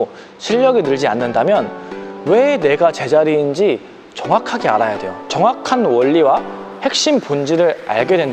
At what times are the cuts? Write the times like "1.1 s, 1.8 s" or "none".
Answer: 5.1 s